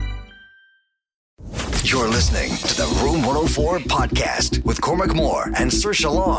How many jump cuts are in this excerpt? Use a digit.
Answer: 1